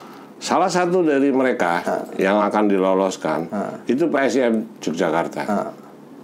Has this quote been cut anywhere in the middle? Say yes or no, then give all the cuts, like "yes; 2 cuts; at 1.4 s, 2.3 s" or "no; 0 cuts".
no; 0 cuts